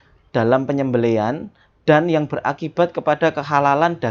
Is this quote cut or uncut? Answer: uncut